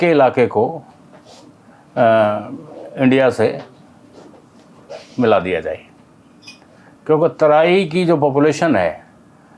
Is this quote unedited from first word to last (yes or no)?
yes